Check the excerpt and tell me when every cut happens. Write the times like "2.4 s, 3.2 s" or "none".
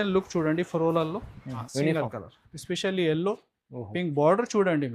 1.7 s